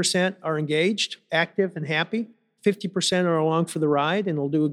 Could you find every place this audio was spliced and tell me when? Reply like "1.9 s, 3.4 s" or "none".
1.1 s